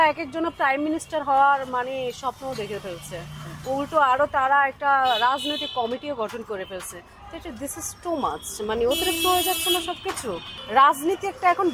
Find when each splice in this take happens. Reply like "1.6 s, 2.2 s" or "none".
10.4 s